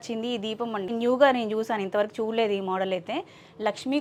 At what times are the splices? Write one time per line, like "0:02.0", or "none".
none

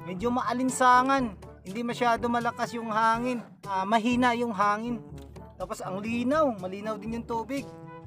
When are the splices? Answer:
0:03.7

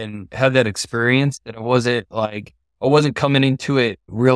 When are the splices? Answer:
none

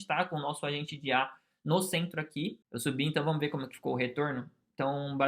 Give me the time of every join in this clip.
0:02.6

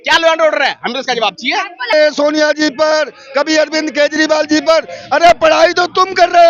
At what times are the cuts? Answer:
0:01.9

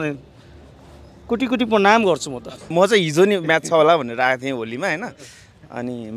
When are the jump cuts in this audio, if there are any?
0:02.7

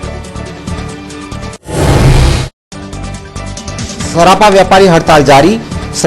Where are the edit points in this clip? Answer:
0:03.3

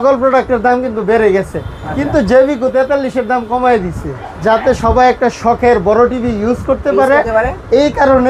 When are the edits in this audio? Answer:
0:04.3

